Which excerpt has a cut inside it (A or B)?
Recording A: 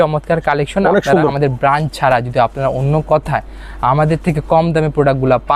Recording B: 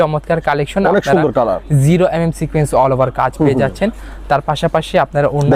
A